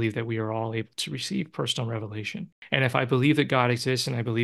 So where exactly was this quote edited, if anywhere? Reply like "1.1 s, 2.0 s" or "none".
2.5 s